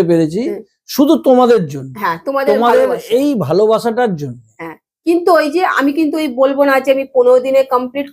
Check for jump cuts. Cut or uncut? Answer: uncut